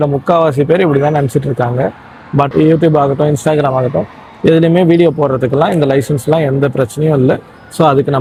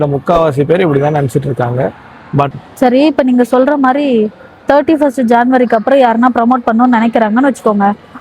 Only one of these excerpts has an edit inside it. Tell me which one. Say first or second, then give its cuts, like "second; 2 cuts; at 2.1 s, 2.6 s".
second; 1 cut; at 2.5 s